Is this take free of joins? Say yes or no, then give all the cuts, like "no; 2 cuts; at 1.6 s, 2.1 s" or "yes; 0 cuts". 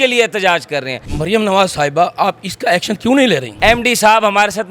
no; 2 cuts; at 1.1 s, 3.5 s